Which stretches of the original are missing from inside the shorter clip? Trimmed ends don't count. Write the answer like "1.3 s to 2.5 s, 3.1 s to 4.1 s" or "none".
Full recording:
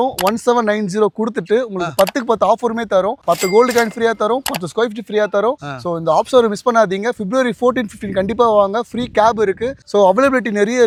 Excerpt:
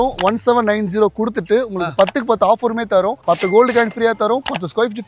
none